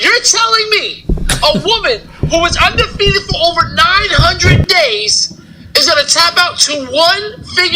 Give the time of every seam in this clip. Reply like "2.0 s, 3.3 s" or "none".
none

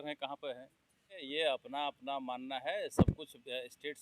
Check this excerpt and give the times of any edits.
1.2 s

